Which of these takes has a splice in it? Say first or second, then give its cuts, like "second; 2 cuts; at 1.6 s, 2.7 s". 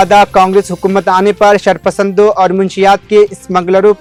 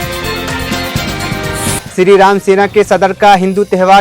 second; 1 cut; at 1.8 s